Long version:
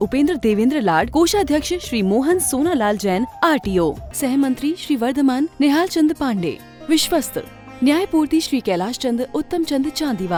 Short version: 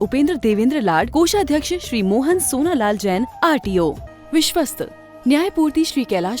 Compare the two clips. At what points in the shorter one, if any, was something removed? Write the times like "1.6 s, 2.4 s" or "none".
4.1 s